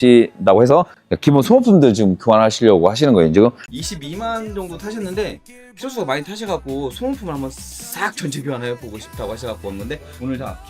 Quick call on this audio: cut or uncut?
cut